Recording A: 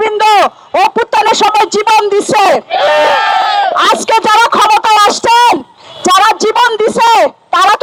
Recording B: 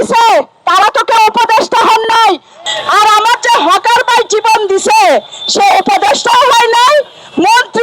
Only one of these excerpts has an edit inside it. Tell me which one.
B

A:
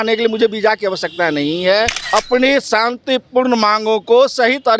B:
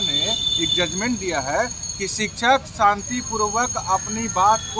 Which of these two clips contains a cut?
A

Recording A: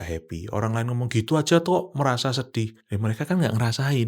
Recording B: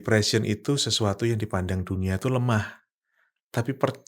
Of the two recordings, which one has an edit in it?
A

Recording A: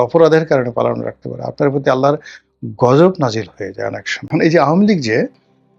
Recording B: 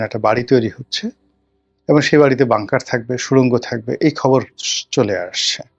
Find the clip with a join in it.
A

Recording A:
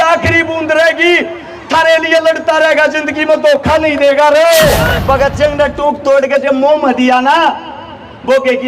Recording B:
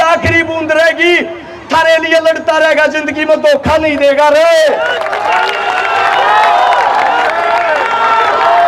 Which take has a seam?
A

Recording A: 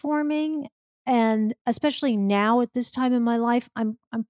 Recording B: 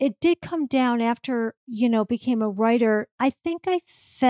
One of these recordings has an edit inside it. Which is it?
B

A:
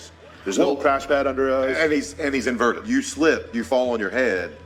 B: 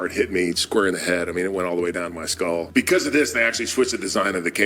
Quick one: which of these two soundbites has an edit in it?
B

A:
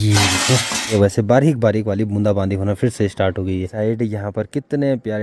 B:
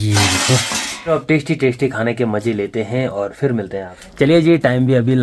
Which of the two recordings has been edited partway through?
A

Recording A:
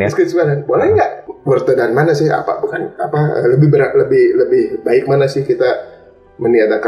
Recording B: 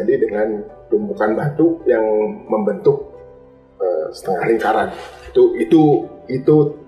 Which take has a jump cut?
A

